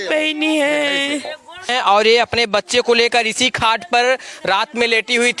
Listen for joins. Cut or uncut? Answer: cut